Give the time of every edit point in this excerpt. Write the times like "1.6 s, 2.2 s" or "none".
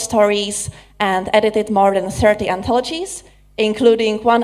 1.4 s